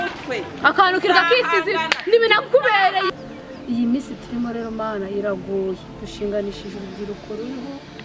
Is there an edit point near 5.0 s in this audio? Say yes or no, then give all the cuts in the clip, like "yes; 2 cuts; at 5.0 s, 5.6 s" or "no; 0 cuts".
no; 1 cut; at 3.1 s